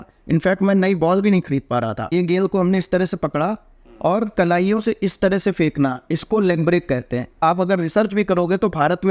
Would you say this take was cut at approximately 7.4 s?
yes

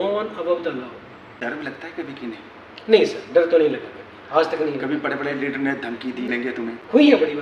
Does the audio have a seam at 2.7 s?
no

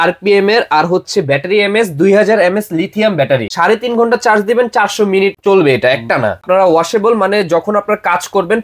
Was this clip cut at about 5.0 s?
no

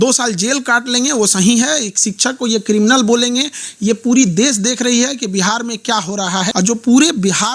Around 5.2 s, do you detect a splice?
no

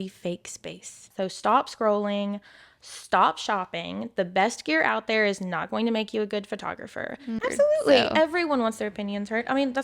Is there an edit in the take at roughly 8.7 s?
no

